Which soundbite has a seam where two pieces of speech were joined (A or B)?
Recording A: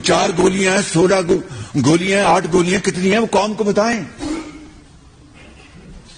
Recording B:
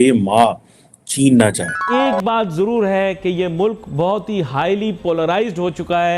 B